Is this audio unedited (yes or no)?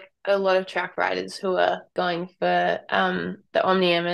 no